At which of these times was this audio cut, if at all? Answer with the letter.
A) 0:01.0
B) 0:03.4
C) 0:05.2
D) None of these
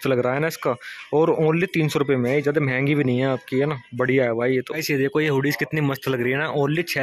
D